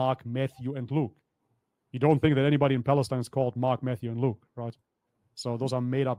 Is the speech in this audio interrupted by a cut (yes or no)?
no